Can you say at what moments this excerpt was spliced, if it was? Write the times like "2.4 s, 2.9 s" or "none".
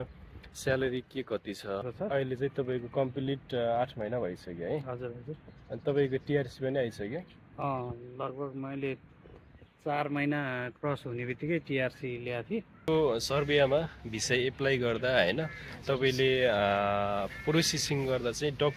1.9 s, 12.8 s